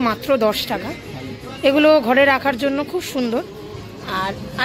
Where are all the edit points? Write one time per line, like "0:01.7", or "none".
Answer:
none